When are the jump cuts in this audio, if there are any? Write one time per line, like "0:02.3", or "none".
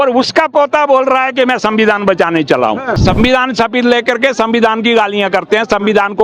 0:03.0